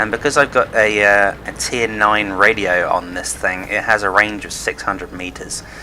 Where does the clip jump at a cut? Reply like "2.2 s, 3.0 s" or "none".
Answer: 3.5 s